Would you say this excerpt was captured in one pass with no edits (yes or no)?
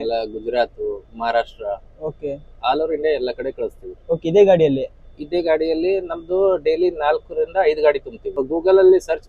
no